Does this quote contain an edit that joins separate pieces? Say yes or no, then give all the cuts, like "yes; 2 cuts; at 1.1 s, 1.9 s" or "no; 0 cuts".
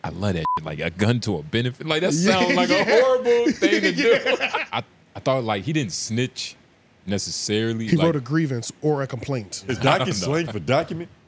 yes; 2 cuts; at 4.6 s, 9.6 s